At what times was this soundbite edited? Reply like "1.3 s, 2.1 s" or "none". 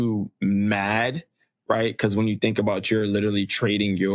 none